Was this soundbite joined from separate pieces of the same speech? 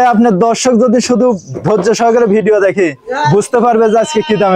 no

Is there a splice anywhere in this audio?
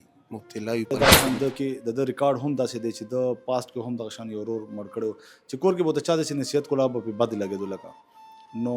yes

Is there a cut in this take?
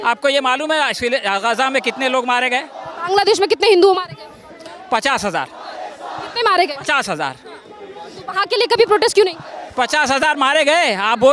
no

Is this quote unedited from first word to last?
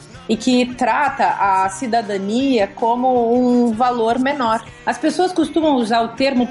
no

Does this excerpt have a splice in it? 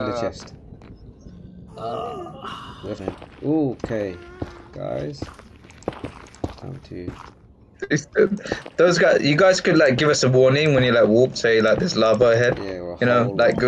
yes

